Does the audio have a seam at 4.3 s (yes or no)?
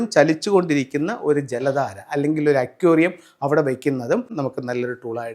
yes